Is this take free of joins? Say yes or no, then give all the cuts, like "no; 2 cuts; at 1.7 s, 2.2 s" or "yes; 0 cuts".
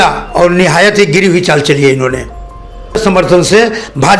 no; 1 cut; at 3.0 s